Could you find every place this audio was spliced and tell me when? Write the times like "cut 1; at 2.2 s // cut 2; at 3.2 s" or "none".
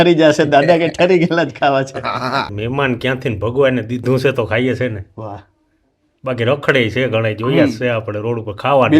cut 1; at 2.5 s